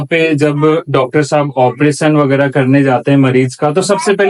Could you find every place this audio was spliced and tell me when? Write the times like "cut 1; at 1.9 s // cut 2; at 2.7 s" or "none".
none